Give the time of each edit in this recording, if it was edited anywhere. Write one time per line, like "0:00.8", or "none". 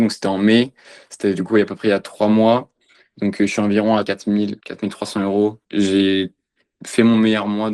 0:05.6